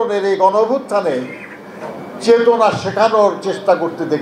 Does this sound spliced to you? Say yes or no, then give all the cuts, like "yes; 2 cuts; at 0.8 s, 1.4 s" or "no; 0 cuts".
no; 0 cuts